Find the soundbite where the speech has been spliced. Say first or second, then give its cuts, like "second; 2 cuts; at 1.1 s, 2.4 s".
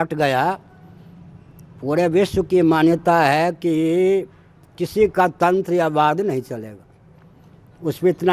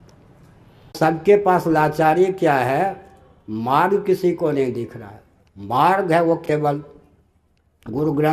second; 1 cut; at 0.9 s